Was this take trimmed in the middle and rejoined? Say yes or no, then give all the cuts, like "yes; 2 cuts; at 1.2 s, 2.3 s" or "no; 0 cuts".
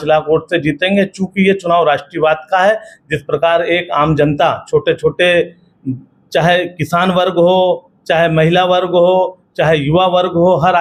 no; 0 cuts